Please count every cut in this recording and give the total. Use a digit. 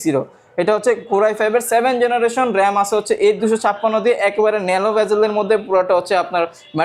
0